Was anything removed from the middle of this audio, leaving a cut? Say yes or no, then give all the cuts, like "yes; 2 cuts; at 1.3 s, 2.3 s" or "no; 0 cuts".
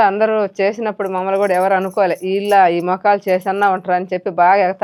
no; 0 cuts